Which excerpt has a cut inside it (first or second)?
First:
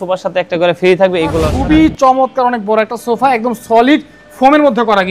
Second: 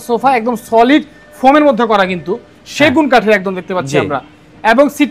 first